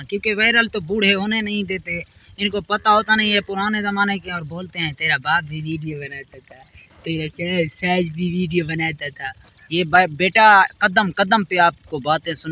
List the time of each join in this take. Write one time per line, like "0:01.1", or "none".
none